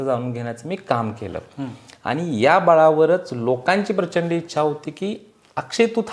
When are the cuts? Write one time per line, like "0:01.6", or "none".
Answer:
none

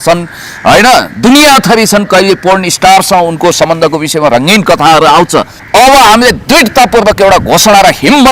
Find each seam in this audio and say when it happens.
0:05.6

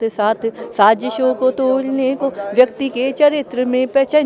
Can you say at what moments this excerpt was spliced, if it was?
none

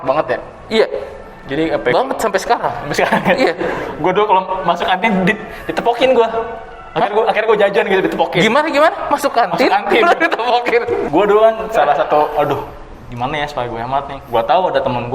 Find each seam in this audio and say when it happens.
0:11.0
0:14.2

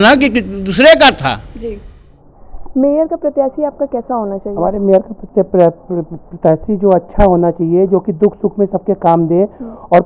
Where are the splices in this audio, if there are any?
0:01.9

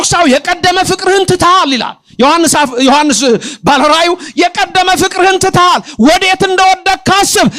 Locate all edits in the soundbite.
none

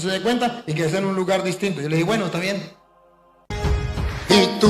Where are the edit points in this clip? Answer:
0:03.4

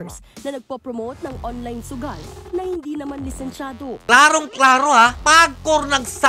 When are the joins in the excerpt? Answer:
0:04.0

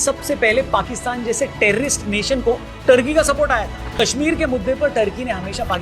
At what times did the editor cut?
0:04.0

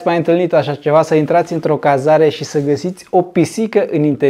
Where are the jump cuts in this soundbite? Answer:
none

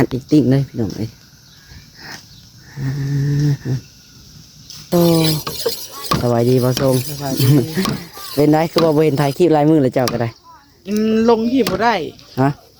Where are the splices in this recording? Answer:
0:04.9

